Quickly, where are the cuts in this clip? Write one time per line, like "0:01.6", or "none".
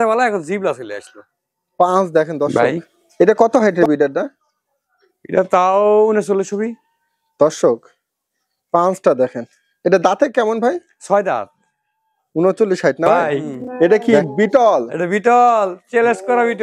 0:02.5
0:13.2